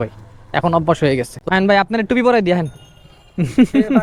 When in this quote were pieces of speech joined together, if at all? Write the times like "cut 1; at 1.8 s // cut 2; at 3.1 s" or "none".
cut 1; at 1.4 s